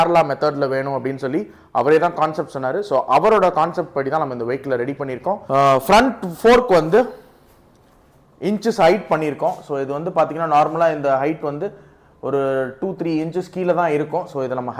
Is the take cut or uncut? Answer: cut